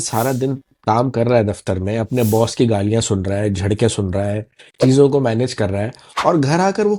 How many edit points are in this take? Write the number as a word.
zero